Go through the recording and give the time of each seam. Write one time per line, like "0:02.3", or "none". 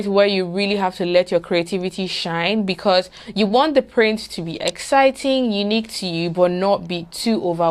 none